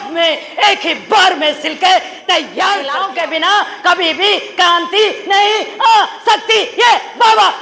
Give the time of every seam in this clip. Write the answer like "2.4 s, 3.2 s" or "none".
3.1 s